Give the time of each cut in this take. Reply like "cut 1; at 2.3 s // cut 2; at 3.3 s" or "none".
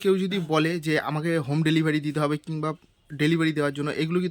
none